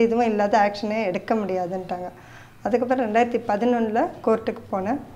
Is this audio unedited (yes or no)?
yes